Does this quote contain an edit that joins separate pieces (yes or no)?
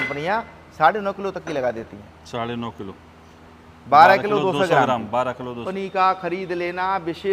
yes